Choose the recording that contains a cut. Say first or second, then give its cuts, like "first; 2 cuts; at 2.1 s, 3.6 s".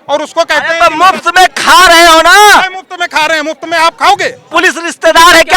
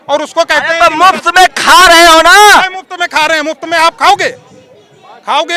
first; 1 cut; at 4.5 s